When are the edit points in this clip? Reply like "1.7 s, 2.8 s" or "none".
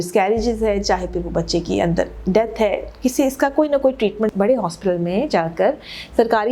4.3 s